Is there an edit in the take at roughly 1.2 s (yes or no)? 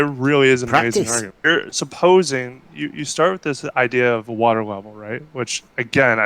yes